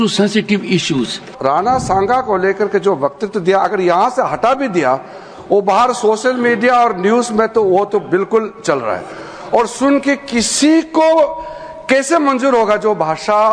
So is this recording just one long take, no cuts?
no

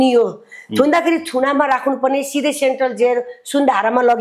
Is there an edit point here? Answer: no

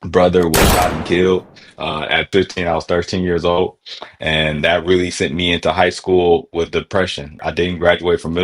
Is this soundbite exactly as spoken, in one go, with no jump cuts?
no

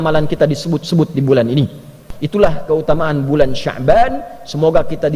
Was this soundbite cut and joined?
yes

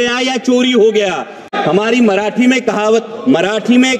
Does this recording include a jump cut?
yes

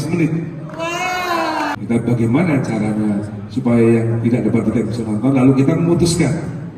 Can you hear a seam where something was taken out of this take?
yes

